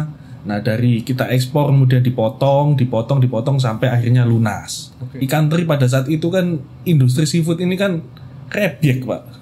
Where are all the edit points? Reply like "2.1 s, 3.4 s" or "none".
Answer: 5.0 s

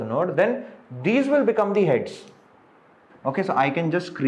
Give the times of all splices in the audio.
3.1 s

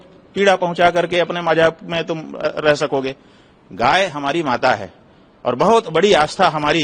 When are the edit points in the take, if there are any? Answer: none

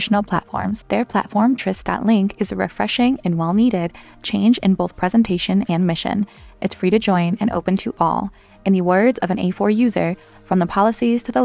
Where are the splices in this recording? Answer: none

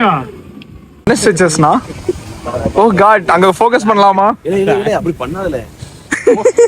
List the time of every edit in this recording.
1.1 s

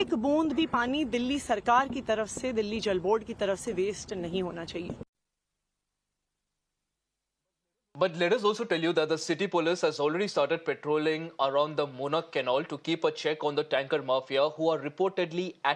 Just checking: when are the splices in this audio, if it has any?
none

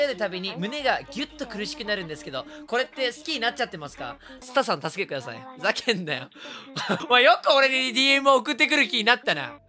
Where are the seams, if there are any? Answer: 4.3 s, 7.0 s

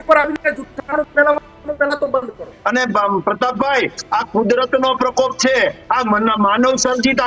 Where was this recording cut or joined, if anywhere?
2.6 s

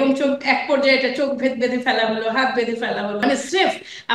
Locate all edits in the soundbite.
3.2 s

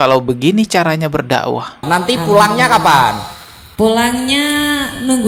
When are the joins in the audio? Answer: 1.8 s

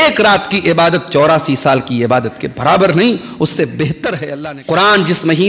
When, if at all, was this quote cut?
4.3 s

